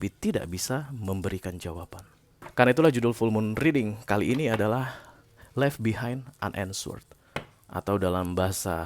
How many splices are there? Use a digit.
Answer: 1